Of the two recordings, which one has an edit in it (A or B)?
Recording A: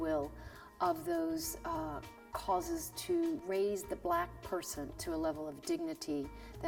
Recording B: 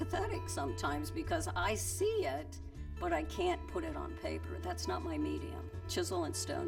B